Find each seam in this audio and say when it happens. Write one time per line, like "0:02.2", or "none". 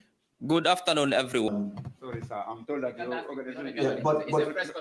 0:01.5